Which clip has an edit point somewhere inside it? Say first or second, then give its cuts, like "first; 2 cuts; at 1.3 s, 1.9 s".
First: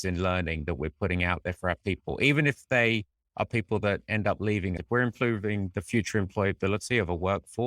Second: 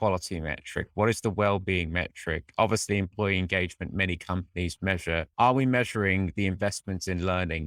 first; 1 cut; at 4.8 s